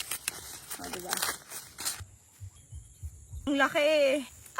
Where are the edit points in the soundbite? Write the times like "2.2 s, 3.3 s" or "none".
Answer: 2.0 s, 3.5 s

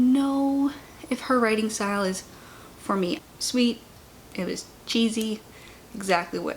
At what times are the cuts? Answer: 3.2 s

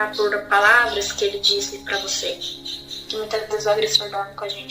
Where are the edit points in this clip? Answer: 3.0 s

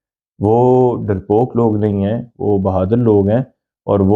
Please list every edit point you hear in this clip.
none

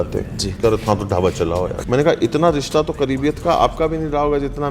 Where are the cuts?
1.8 s

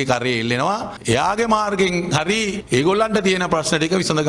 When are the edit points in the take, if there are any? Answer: 0.9 s, 2.6 s

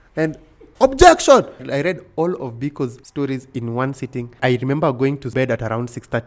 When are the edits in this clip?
1.6 s, 3.0 s, 4.4 s, 5.3 s

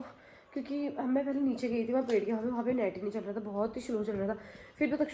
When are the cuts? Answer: none

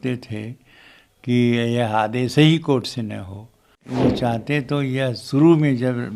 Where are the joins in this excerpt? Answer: 3.8 s

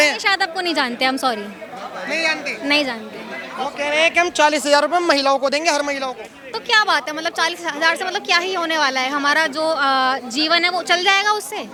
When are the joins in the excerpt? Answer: none

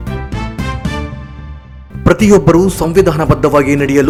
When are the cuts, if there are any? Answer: none

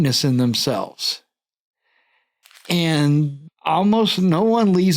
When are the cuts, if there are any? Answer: 3.4 s

